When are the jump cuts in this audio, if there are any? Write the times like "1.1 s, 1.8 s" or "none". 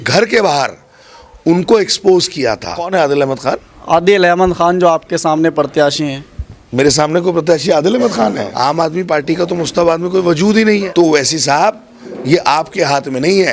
2.7 s, 8.5 s, 10.9 s

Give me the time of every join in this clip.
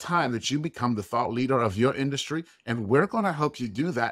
none

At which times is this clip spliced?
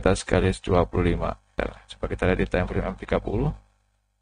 1.5 s

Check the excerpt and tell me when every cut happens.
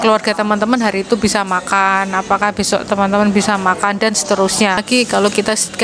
4.8 s

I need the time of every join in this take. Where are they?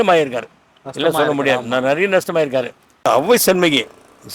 3.0 s

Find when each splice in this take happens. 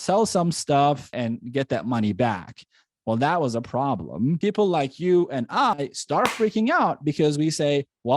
1.1 s, 4.4 s

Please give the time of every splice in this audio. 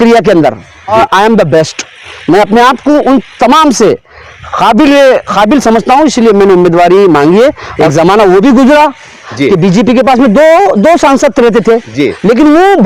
0.9 s, 7.7 s

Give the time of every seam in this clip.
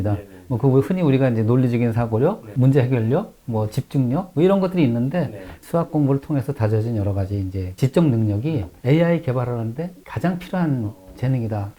5.6 s

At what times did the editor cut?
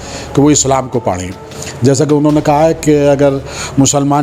none

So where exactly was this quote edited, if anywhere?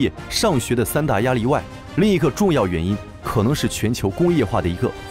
none

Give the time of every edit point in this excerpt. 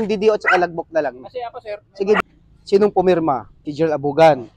2.2 s

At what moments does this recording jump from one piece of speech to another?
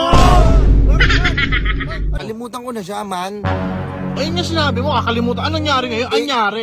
2.2 s

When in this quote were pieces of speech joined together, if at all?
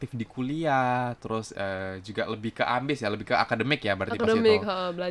none

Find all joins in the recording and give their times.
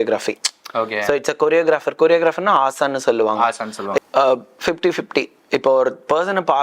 4.0 s

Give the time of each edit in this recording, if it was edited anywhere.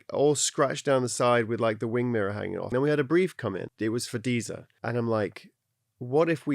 2.6 s, 3.7 s, 4.6 s

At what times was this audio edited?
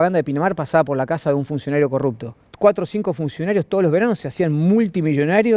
2.4 s

